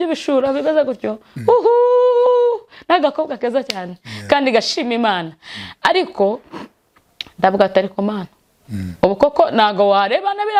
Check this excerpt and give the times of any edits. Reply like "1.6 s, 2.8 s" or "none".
none

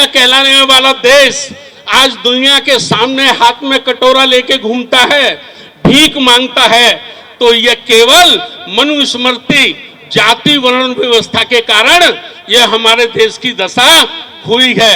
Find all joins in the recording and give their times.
none

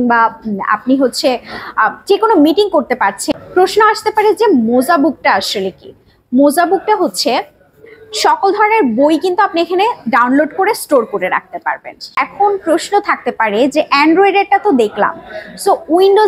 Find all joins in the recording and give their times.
3.4 s, 12.2 s

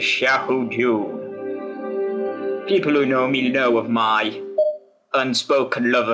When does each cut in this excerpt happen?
1.9 s

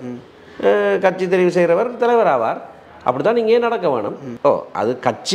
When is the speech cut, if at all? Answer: 4.2 s

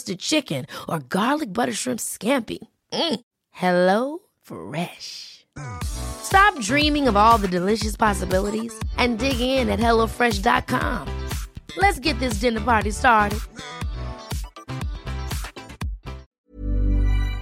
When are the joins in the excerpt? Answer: 16.2 s

